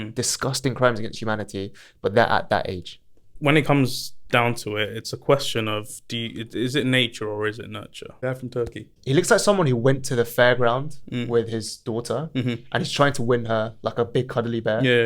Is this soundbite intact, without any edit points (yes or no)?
no